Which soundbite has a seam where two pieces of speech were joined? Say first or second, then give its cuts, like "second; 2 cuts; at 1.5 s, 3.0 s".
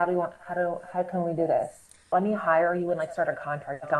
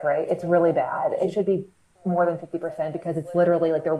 first; 1 cut; at 2.1 s